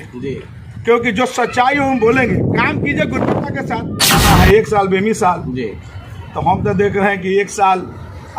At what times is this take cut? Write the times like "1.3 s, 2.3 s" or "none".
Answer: 4.2 s